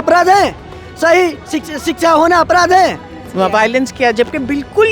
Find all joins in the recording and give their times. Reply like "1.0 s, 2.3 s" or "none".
3.2 s